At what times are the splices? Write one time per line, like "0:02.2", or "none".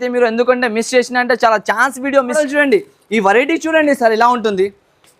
0:02.4